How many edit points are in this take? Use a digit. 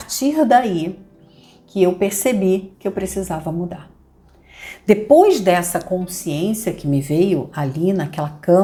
0